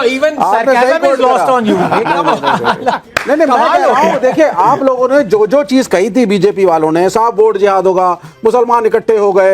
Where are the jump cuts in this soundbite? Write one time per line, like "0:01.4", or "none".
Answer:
none